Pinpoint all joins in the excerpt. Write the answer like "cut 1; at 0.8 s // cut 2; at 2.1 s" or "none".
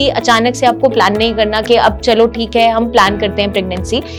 none